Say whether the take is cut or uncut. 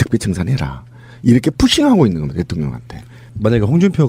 uncut